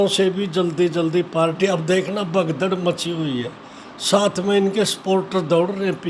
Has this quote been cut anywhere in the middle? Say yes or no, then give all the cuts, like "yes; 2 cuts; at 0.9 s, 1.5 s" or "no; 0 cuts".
no; 0 cuts